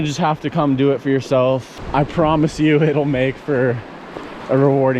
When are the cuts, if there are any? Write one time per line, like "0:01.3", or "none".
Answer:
0:01.8